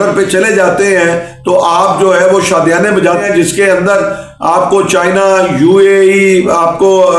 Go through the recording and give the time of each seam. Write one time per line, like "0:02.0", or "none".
0:03.2